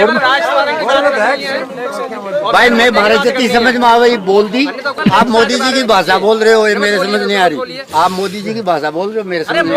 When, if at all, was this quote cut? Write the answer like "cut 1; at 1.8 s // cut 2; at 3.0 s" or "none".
cut 1; at 5.0 s